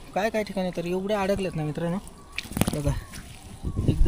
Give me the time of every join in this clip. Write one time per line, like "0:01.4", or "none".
none